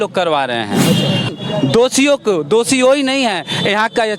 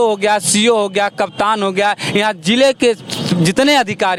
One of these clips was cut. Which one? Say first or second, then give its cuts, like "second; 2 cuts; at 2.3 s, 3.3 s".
first; 1 cut; at 1.3 s